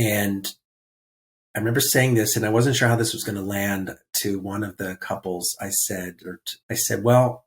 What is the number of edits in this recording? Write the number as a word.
one